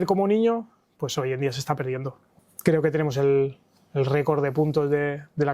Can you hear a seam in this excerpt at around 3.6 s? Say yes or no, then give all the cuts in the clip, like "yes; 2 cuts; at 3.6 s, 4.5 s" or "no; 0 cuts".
no; 1 cut; at 2.2 s